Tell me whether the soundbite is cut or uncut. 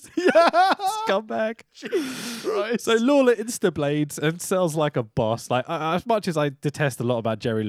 uncut